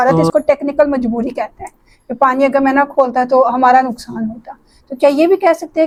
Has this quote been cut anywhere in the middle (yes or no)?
no